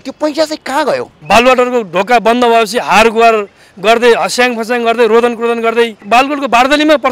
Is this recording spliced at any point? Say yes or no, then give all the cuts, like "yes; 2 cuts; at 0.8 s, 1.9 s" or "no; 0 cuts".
yes; 2 cuts; at 1.1 s, 6.0 s